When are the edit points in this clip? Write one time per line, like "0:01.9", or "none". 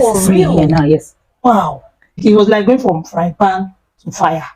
0:02.2